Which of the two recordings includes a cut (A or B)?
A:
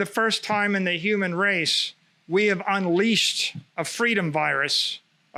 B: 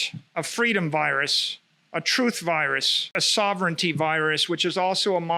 B